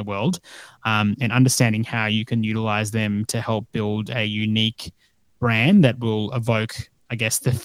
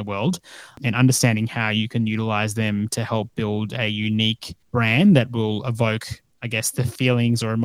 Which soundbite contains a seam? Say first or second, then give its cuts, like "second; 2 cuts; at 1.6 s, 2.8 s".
second; 2 cuts; at 0.8 s, 4.5 s